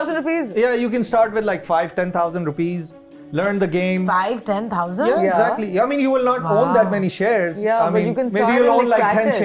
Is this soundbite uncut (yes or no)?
yes